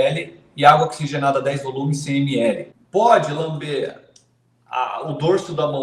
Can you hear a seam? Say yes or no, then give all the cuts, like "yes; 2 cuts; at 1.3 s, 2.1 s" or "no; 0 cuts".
yes; 1 cut; at 2.7 s